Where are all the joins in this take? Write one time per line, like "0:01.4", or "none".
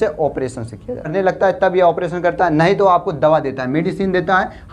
0:01.1